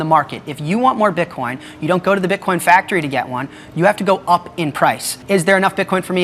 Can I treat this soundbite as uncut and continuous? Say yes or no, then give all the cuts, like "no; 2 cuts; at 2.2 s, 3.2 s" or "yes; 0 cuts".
no; 1 cut; at 5.1 s